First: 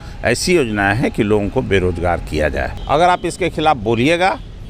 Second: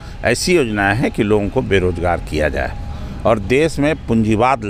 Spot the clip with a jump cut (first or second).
first